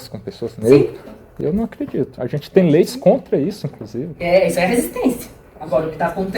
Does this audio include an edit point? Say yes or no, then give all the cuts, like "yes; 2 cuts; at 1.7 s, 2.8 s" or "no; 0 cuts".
no; 0 cuts